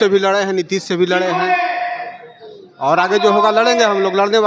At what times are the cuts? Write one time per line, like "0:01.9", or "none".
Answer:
none